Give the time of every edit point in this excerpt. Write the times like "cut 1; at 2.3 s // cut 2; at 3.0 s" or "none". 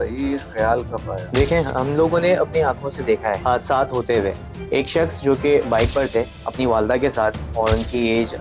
cut 1; at 1.2 s // cut 2; at 3.4 s // cut 3; at 4.5 s